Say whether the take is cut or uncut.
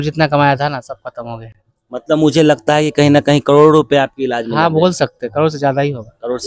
uncut